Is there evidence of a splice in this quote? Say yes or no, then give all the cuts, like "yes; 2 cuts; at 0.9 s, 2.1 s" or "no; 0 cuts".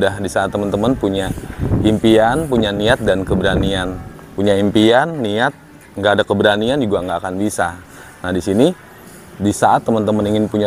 no; 0 cuts